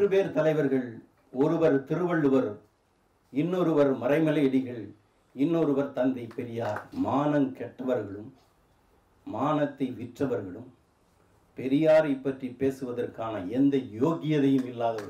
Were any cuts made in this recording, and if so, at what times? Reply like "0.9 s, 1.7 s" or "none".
6.8 s